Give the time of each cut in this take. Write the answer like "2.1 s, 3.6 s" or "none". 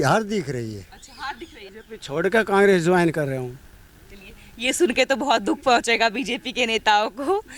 1.7 s